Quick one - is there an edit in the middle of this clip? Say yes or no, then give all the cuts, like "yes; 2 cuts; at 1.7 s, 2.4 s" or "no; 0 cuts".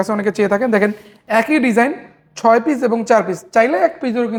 no; 0 cuts